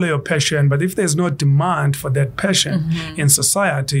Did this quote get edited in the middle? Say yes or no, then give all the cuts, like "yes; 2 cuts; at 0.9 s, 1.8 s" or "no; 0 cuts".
no; 0 cuts